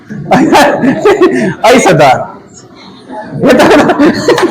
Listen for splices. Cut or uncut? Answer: cut